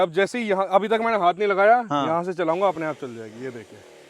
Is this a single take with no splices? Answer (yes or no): yes